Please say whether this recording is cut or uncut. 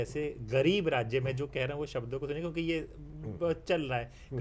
uncut